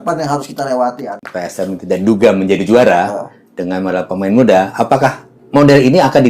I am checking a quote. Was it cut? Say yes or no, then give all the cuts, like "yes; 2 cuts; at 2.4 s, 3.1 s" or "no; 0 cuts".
yes; 1 cut; at 1.2 s